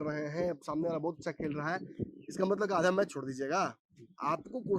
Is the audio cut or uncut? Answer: uncut